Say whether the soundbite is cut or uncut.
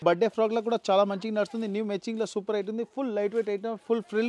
uncut